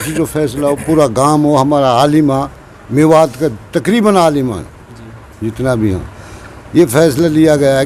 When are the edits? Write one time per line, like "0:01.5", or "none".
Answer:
none